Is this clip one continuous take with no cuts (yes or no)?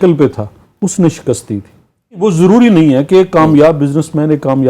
no